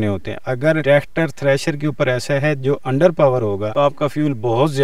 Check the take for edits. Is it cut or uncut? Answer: cut